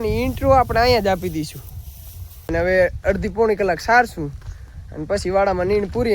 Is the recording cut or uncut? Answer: cut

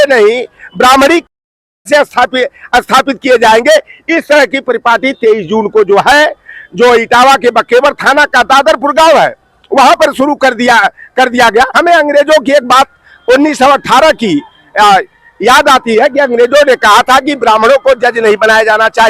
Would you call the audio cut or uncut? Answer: cut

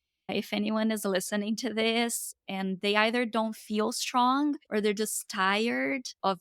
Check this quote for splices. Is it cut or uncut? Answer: uncut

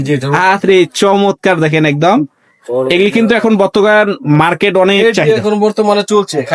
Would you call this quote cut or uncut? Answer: uncut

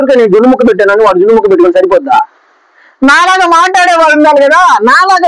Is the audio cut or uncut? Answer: uncut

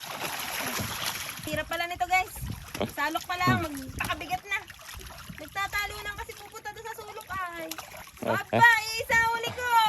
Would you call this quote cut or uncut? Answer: cut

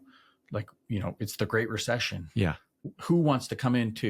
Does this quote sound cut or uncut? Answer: cut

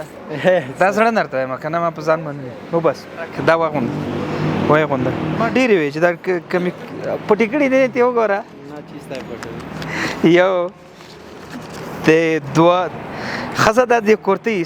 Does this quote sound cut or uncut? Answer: cut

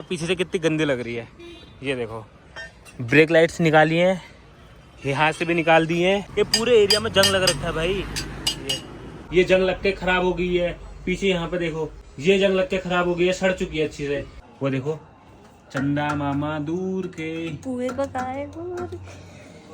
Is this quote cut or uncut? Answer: cut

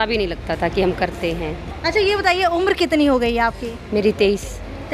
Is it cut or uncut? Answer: cut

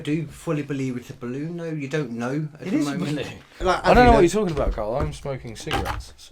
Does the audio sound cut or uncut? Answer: cut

